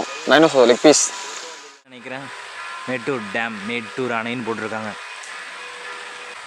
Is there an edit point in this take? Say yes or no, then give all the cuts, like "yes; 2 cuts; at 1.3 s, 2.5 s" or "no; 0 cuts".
no; 0 cuts